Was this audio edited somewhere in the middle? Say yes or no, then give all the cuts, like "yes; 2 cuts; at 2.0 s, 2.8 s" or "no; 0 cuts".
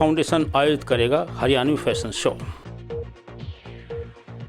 yes; 1 cut; at 2.4 s